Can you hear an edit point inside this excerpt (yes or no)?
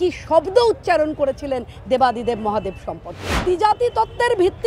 yes